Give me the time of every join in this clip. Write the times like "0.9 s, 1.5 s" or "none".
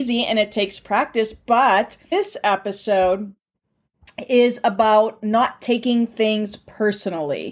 2.1 s